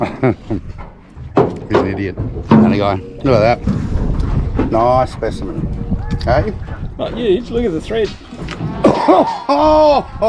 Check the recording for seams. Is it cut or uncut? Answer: uncut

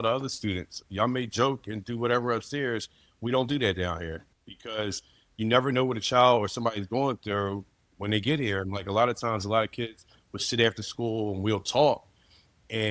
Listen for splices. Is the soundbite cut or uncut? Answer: cut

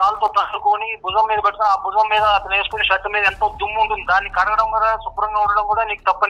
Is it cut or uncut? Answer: uncut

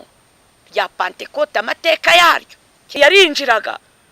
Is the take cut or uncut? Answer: cut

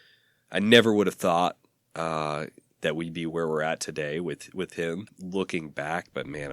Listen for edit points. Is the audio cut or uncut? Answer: cut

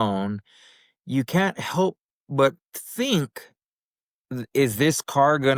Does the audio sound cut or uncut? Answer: uncut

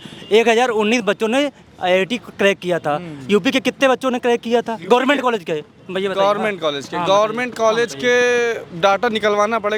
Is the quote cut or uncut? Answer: uncut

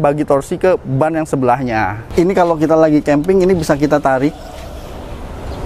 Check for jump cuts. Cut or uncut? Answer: cut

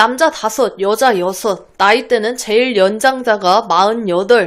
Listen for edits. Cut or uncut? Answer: uncut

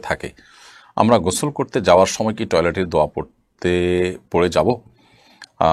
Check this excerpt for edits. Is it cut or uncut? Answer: uncut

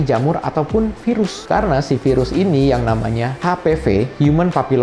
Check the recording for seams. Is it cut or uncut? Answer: uncut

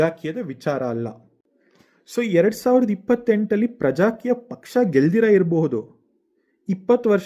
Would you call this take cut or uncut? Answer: uncut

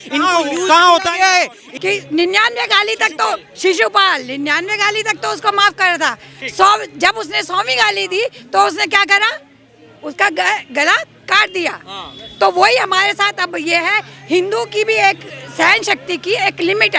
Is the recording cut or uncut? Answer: cut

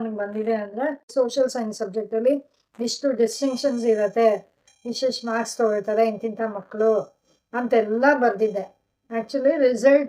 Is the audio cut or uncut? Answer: cut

